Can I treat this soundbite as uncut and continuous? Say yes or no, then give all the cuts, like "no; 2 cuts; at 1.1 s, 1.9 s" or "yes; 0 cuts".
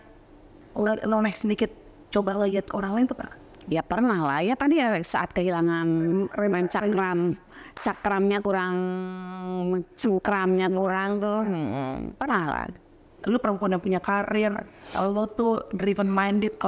no; 1 cut; at 13.2 s